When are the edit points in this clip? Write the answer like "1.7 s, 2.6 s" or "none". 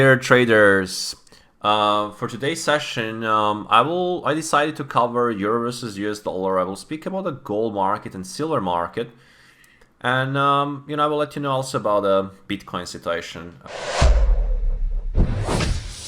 13.7 s

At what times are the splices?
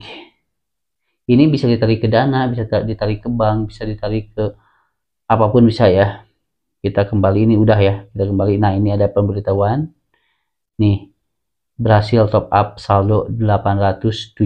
none

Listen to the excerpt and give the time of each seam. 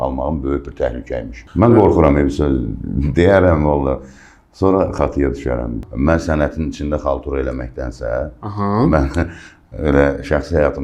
1.4 s, 5.8 s

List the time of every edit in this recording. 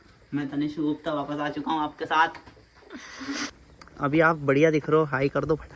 3.5 s

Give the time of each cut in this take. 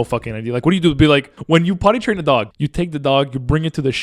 1.3 s, 2.6 s

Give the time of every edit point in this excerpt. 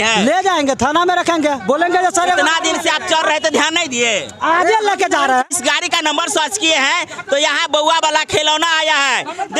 5.5 s

